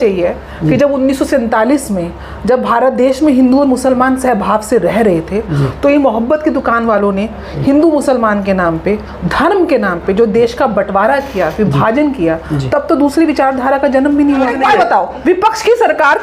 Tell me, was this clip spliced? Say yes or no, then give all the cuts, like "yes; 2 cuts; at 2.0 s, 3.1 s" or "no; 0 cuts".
yes; 1 cut; at 14.5 s